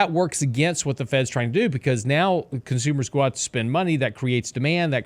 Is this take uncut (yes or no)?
yes